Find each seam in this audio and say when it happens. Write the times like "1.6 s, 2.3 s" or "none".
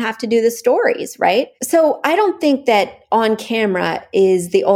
1.5 s